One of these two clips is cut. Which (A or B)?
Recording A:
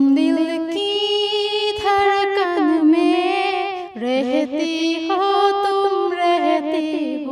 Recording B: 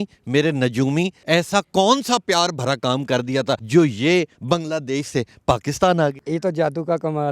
B